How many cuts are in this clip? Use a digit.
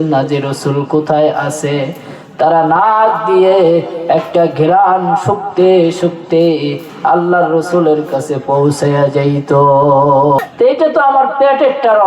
1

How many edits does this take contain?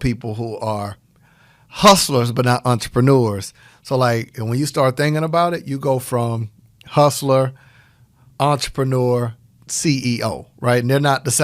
0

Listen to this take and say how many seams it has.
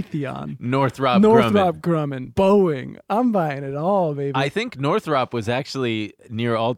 1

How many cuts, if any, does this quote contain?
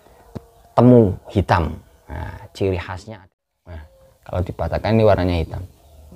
1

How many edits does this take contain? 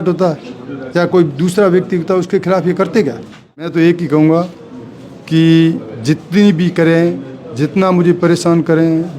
1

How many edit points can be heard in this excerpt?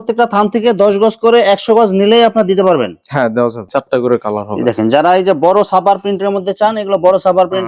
1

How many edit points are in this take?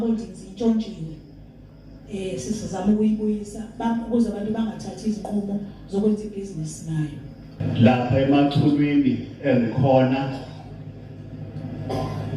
1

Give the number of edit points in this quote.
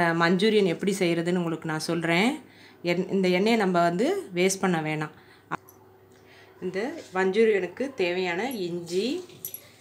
0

